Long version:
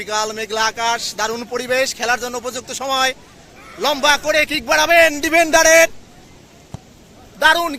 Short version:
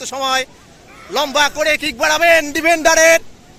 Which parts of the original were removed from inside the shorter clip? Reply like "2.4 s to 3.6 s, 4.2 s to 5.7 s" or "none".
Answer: none